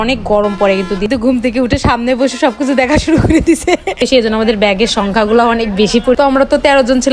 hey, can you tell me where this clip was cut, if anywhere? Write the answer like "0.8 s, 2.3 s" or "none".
1.1 s, 4.0 s